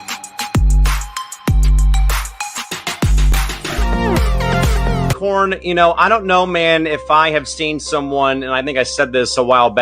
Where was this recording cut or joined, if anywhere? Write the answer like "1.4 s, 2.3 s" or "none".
5.2 s